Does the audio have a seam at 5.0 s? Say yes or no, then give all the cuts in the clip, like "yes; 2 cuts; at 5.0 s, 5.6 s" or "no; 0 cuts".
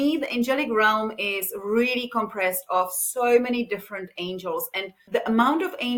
yes; 1 cut; at 5.0 s